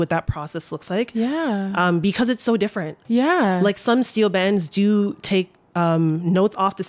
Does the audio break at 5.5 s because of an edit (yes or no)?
no